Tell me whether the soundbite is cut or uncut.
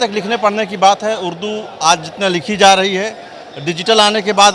uncut